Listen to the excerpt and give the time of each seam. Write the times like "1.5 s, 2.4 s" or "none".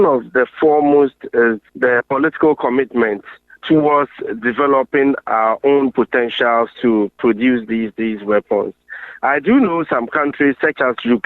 none